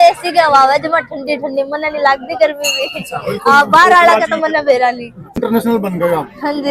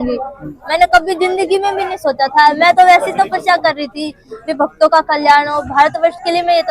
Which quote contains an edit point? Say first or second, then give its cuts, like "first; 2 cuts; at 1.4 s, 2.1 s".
first; 1 cut; at 5.4 s